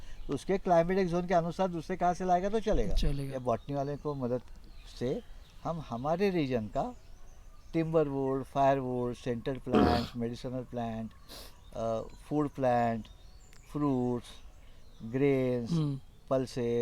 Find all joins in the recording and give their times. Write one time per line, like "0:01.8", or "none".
0:03.3

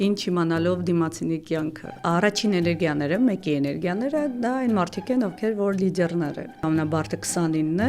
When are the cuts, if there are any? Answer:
0:01.9
0:06.6

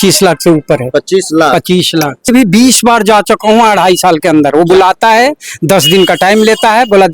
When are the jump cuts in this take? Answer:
0:02.3

